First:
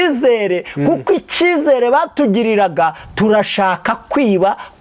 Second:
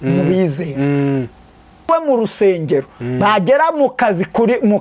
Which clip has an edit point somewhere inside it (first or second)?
second